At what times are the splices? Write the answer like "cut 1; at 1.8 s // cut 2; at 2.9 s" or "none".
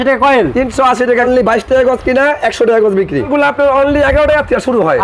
cut 1; at 1.3 s // cut 2; at 3.3 s